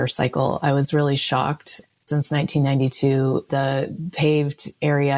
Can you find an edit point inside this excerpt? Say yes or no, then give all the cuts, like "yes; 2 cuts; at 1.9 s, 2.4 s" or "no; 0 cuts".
yes; 2 cuts; at 2.0 s, 3.4 s